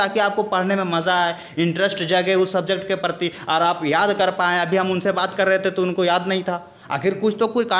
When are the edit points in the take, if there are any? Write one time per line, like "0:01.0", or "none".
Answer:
none